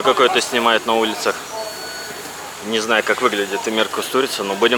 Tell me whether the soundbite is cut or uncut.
uncut